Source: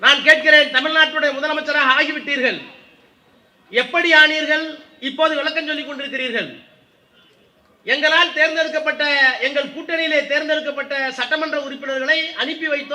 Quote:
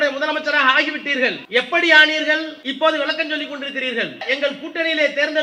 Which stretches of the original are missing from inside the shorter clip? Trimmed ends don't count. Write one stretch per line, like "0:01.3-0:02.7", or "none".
0:02.6-0:03.6
0:04.8-0:05.0
0:06.6-0:09.4